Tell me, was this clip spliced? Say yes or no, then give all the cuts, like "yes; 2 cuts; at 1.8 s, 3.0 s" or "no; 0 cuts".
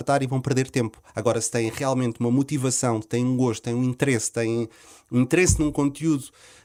no; 0 cuts